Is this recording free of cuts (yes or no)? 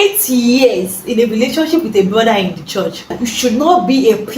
no